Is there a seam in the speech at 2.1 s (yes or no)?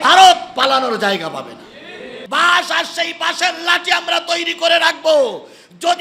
yes